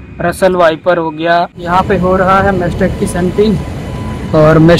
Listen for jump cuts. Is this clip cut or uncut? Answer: cut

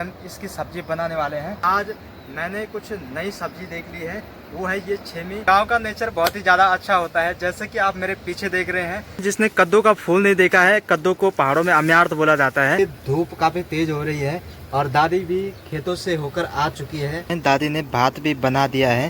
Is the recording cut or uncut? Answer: cut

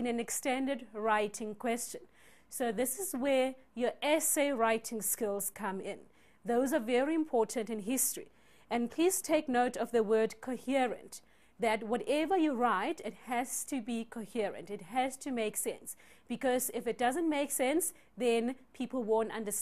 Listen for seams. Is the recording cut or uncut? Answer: uncut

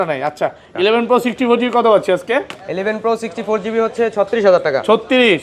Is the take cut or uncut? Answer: uncut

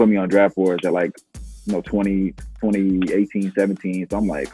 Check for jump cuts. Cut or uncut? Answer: uncut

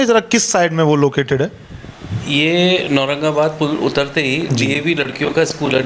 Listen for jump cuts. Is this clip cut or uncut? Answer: uncut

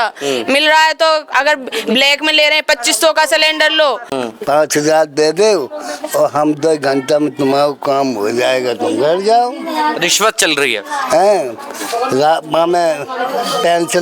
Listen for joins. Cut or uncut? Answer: cut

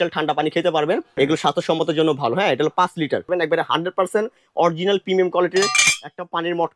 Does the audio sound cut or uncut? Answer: cut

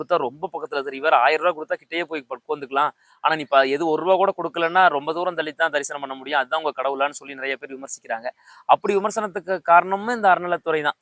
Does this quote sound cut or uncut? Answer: uncut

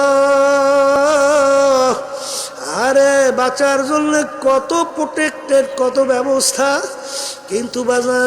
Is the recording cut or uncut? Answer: cut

